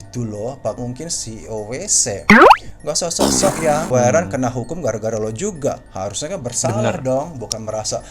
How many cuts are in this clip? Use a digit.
2